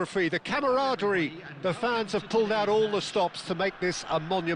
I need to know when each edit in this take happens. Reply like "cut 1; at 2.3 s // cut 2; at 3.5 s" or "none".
none